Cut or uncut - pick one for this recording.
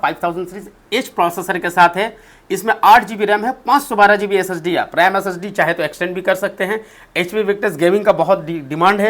uncut